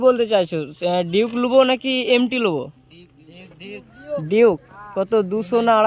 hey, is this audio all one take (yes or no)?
yes